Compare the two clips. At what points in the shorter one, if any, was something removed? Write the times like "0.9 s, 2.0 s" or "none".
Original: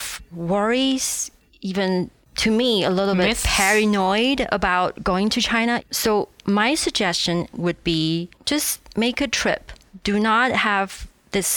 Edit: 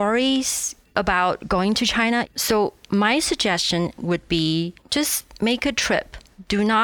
0.9 s